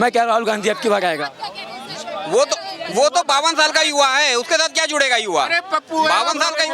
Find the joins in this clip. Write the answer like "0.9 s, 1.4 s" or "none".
none